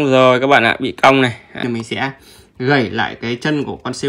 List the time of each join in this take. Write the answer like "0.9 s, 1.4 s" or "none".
1.6 s